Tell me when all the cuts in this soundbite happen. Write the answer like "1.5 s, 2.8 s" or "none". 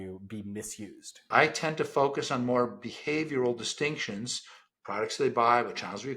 1.3 s